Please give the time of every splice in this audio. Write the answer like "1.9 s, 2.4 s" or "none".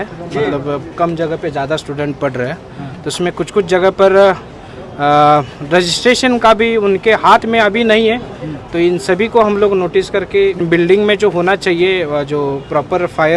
10.6 s